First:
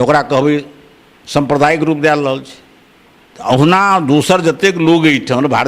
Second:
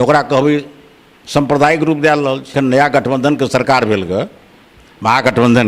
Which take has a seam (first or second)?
second